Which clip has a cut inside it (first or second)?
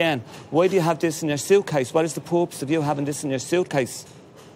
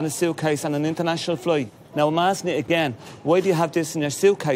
second